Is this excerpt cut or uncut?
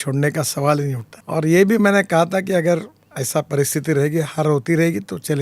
cut